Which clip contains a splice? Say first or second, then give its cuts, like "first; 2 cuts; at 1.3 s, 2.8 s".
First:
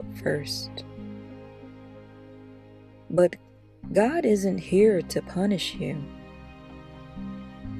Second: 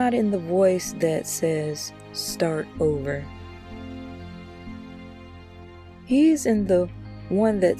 second; 2 cuts; at 3.6 s, 6.0 s